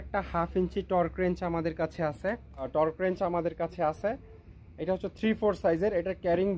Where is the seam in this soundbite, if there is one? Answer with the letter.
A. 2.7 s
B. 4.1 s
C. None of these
A